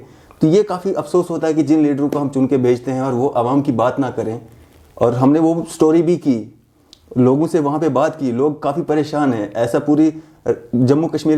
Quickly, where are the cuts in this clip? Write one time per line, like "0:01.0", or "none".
none